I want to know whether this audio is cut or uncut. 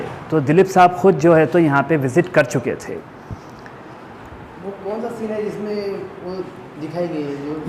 uncut